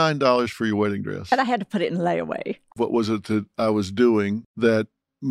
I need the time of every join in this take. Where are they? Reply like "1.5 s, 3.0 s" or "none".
2.7 s, 4.5 s